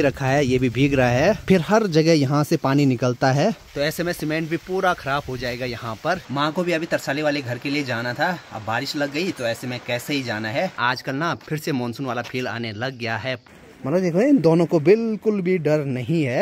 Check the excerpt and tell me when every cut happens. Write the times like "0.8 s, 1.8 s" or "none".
1.4 s, 6.2 s, 10.8 s, 13.5 s